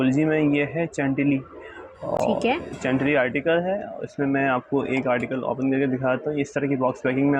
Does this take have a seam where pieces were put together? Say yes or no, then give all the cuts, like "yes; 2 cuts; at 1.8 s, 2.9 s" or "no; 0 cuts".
no; 0 cuts